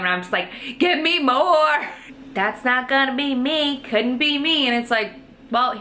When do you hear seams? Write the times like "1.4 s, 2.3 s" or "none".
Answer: 2.0 s